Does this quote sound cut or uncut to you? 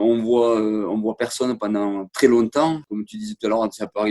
uncut